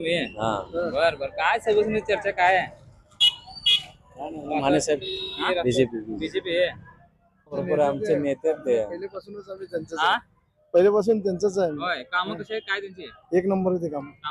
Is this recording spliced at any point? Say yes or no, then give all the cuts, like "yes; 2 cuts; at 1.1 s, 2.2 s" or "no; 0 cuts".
yes; 2 cuts; at 5.4 s, 7.6 s